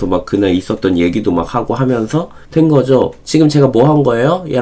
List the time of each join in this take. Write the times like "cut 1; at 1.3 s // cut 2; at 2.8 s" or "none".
none